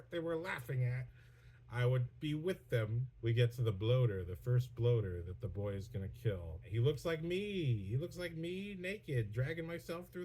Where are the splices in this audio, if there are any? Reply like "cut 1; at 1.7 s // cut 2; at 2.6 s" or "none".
cut 1; at 3.1 s // cut 2; at 6.7 s